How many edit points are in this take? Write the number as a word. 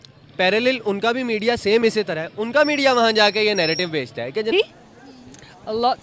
one